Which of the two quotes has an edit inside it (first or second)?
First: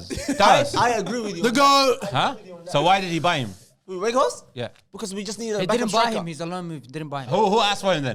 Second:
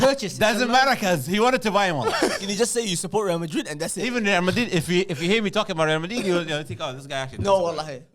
second